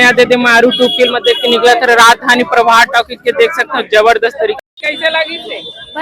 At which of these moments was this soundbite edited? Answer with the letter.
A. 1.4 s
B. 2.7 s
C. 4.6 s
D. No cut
C